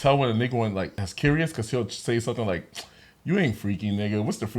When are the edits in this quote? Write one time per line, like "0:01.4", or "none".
0:01.0